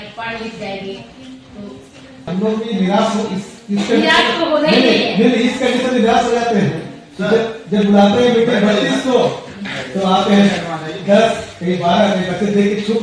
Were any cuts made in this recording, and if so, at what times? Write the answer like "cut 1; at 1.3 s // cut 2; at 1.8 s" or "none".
cut 1; at 2.3 s